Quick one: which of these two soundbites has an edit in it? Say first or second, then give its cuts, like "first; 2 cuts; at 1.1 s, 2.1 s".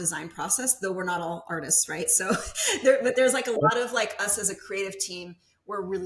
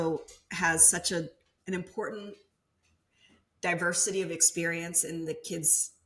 second; 1 cut; at 1.5 s